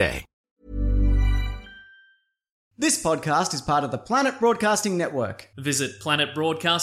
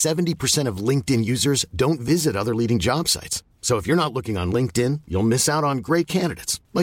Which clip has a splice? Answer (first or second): first